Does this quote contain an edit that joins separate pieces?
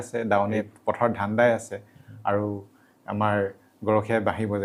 no; 0 cuts

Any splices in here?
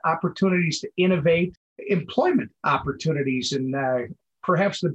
no; 0 cuts

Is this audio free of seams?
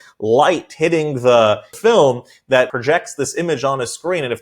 no; 2 cuts; at 1.7 s, 2.7 s

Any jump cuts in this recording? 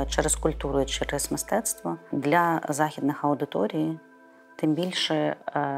yes; 1 cut; at 2.1 s

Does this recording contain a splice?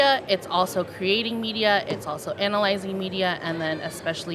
no; 0 cuts

